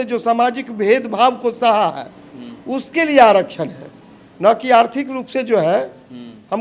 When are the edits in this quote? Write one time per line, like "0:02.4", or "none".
none